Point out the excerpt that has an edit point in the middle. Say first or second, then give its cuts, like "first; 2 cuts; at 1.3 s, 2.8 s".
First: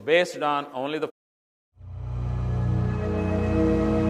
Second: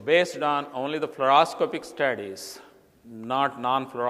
second; 1 cut; at 1.1 s